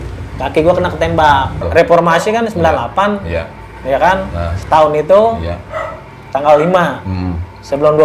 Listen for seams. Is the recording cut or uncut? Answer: cut